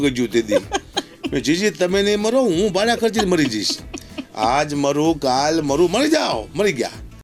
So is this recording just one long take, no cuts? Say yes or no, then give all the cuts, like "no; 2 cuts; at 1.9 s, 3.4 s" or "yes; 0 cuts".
yes; 0 cuts